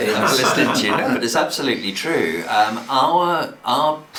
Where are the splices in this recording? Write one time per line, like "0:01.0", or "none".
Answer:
none